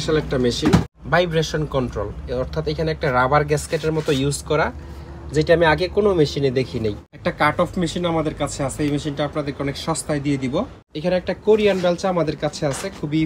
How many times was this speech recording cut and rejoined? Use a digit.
3